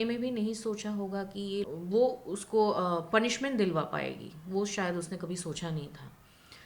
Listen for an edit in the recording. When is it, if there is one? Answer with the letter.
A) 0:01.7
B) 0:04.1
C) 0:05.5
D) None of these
A